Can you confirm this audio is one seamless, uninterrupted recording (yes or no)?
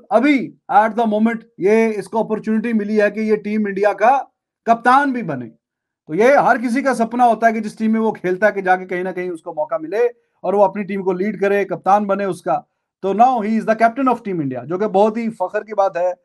yes